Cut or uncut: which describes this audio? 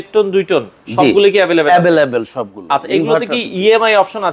uncut